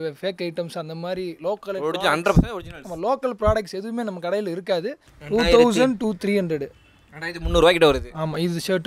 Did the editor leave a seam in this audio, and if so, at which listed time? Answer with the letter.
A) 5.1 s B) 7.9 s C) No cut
A